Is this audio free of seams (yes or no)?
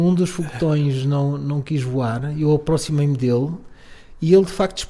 yes